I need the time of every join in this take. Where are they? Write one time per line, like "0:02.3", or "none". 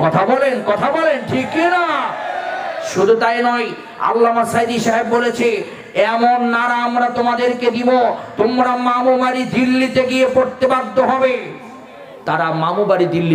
none